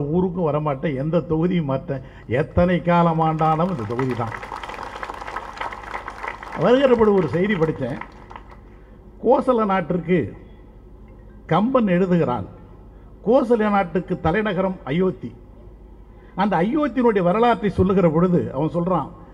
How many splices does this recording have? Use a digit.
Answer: 0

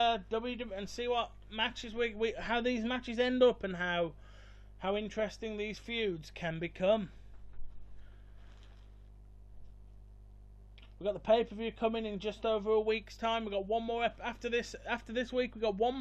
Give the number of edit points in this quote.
1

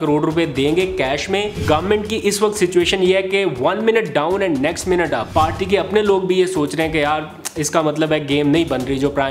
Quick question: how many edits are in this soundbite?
2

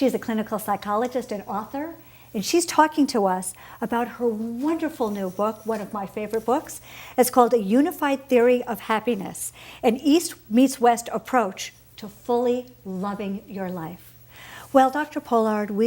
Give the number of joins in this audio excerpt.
1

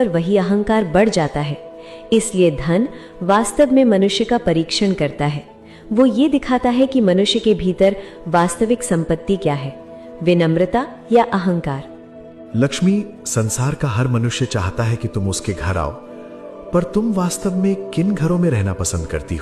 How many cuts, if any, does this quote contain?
1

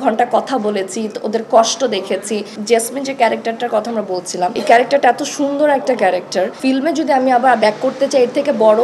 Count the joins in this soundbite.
3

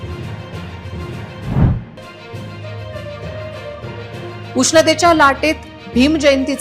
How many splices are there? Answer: 0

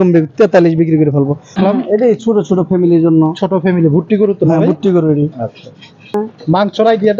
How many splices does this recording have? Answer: 2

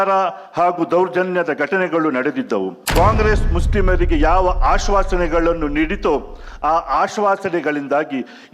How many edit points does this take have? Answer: 1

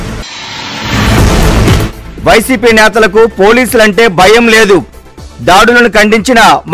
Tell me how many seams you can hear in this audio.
1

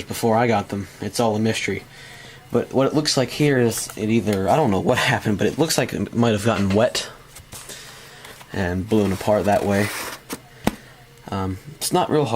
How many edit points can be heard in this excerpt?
1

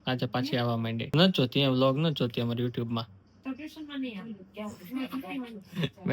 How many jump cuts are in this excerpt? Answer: 1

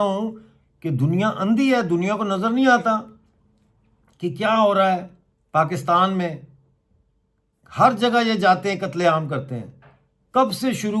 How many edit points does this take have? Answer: 0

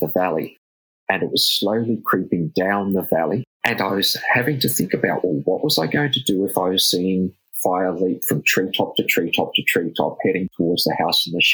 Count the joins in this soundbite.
2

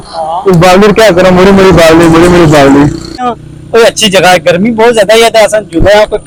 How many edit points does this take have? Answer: 0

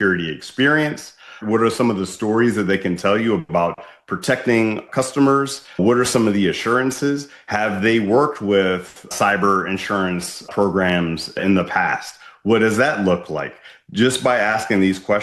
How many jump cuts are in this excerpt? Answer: 3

